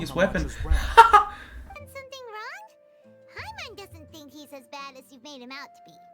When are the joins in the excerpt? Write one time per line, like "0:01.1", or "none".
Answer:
0:01.8

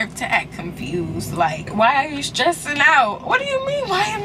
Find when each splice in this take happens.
0:01.6

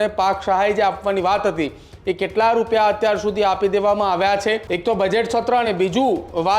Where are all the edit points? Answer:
0:04.7

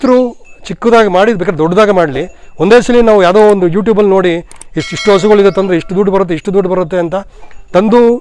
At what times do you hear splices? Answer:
none

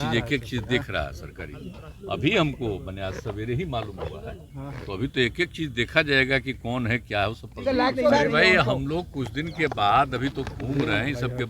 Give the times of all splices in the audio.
0:08.2

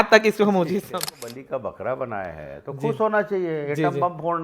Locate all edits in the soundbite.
0:00.9

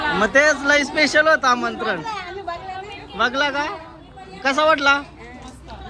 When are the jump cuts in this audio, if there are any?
none

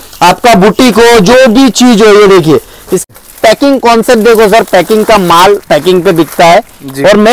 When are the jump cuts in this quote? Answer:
0:03.0

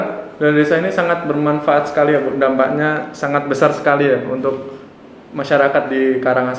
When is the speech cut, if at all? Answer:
none

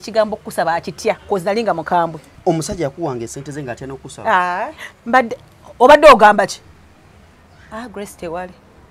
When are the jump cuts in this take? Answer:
0:02.3
0:04.9

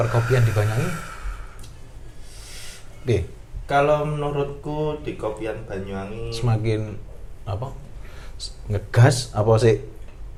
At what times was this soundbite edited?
none

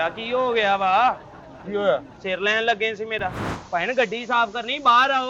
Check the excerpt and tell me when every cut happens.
0:03.5

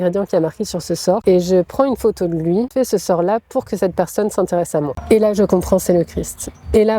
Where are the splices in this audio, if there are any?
0:01.2
0:02.7
0:05.0

